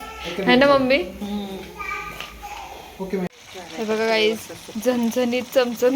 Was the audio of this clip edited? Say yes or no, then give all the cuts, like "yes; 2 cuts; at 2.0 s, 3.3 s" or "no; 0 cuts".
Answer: yes; 1 cut; at 3.3 s